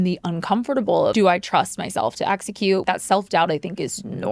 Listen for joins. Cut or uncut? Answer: cut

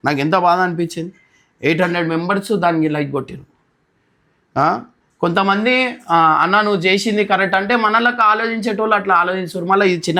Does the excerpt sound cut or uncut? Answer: uncut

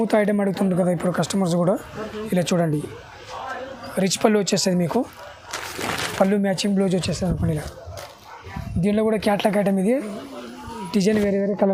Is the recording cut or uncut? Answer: uncut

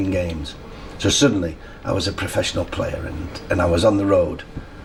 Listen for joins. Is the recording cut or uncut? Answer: uncut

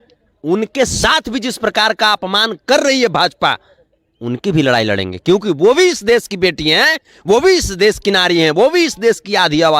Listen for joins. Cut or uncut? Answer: uncut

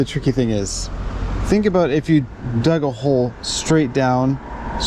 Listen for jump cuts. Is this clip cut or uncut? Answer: uncut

